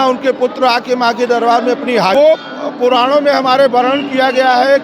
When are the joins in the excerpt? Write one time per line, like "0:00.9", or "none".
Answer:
0:02.1